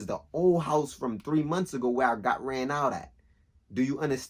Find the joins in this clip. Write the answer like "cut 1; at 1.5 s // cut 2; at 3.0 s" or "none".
none